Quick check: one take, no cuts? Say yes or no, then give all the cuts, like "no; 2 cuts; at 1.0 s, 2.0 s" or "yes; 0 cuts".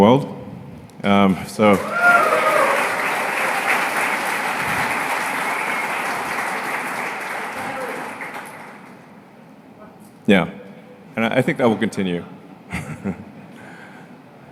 yes; 0 cuts